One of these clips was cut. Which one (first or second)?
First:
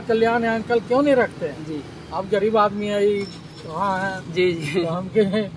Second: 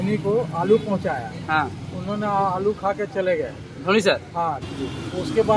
second